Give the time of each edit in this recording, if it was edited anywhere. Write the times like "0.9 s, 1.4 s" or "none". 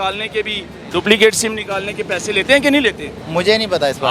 3.2 s